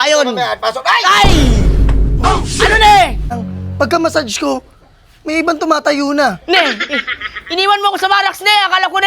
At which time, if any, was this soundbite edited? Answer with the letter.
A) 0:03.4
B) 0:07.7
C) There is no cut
A